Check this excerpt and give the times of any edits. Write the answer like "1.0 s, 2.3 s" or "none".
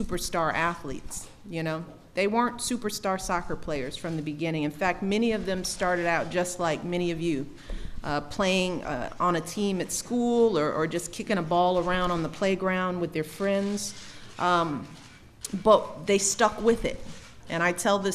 1.6 s

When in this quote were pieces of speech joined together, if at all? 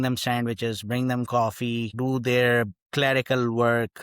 1.9 s

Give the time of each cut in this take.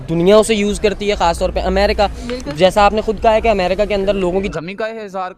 4.5 s

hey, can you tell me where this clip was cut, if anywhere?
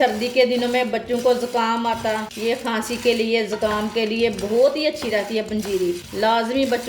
2.3 s, 6.1 s

